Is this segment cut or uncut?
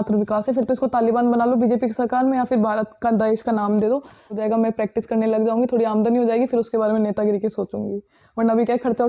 cut